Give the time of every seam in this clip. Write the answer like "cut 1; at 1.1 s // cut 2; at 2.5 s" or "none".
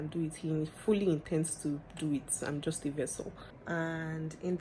cut 1; at 3.5 s